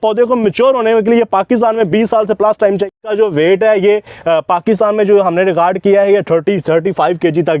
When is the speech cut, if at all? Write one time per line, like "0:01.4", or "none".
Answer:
0:02.9